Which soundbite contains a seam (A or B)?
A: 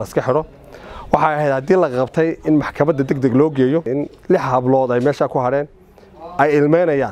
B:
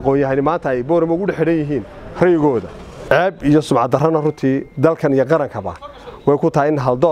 A